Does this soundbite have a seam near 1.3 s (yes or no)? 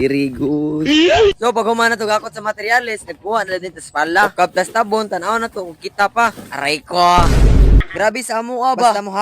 yes